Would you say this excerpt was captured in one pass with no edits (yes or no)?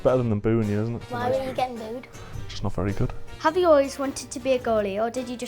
no